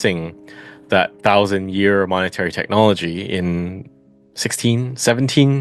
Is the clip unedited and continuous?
yes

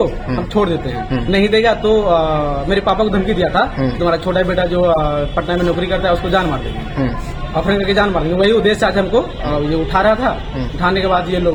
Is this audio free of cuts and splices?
yes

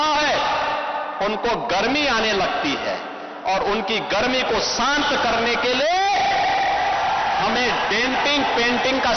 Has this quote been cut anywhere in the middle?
no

